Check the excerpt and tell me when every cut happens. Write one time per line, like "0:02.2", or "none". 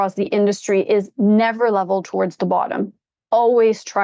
none